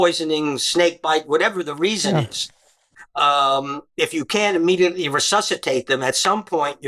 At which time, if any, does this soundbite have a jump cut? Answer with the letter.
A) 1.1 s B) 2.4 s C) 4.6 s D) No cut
D